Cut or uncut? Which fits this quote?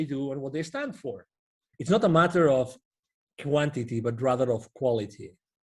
cut